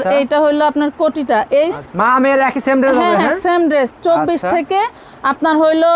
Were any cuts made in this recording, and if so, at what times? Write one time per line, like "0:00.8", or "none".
0:01.8